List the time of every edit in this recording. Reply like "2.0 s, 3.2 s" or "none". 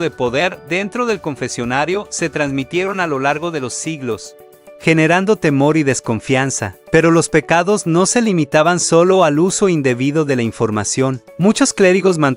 6.7 s